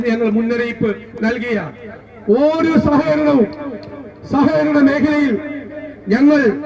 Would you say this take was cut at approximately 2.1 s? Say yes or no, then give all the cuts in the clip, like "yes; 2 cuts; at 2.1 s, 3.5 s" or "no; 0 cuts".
no; 0 cuts